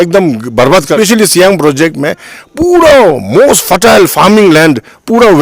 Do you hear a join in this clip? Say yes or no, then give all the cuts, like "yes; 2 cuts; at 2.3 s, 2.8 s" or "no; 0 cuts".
yes; 1 cut; at 0.9 s